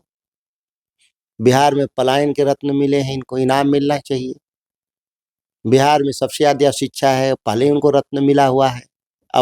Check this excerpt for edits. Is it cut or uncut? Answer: uncut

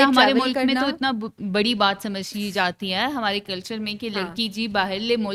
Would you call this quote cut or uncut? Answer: uncut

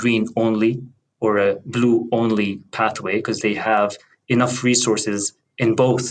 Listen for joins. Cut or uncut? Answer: uncut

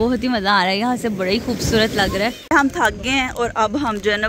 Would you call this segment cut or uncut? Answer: cut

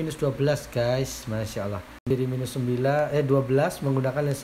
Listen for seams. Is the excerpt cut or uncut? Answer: cut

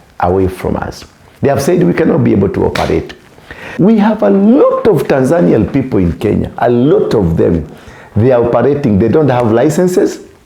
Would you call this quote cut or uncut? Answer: cut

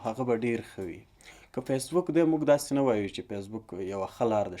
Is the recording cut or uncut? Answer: uncut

